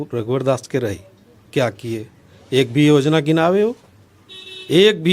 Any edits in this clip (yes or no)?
no